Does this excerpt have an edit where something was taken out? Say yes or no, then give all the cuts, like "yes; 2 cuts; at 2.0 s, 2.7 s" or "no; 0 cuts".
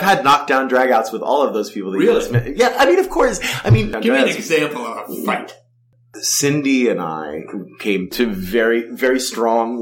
yes; 2 cuts; at 3.9 s, 5.8 s